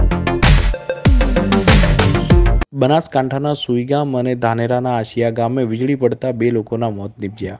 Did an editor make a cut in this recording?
no; 0 cuts

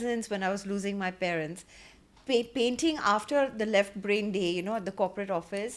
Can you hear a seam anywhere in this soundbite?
no; 0 cuts

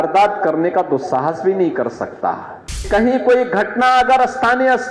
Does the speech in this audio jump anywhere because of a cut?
yes; 1 cut; at 2.8 s

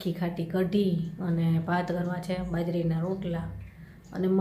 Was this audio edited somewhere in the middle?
no; 0 cuts

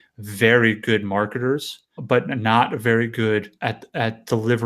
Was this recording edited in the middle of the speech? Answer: yes; 2 cuts; at 2.0 s, 3.5 s

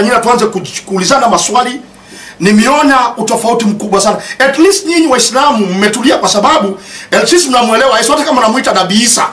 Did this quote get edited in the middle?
no; 0 cuts

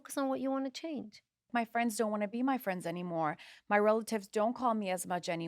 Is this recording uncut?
no; 1 cut; at 1.5 s

